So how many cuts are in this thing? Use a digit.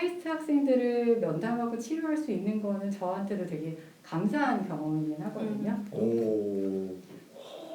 1